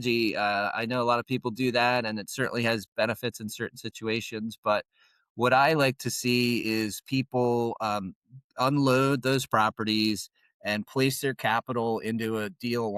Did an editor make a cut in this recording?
no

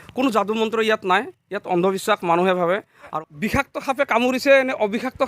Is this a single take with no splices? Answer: no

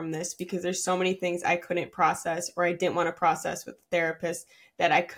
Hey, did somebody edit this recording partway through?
no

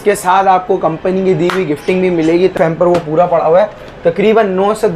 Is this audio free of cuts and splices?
no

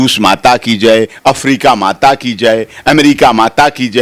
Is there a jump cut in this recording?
no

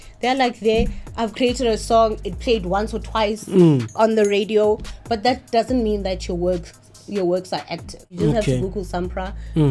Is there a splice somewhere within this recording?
yes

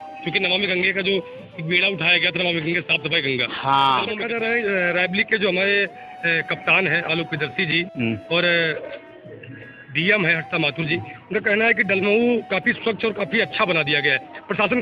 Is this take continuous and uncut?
no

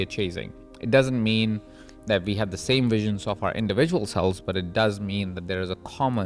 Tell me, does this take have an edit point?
no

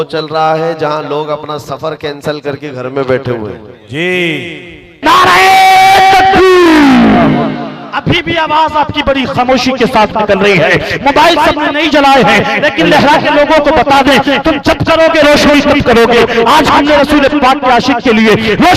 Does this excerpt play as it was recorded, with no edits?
no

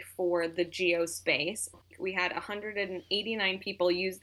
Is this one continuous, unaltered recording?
no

